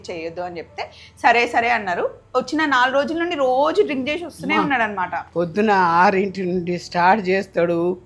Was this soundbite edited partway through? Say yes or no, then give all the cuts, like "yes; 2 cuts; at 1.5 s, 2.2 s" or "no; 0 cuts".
no; 0 cuts